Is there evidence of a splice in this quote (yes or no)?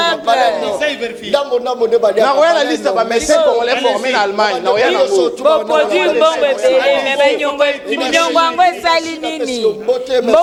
no